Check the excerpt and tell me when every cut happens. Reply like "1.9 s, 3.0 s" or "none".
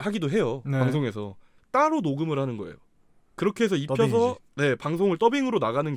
1.5 s